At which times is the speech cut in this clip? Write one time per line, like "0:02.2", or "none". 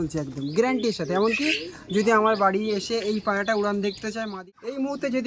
0:04.3